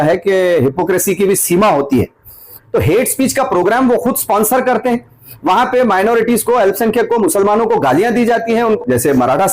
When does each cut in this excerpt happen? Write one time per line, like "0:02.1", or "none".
0:02.6
0:08.8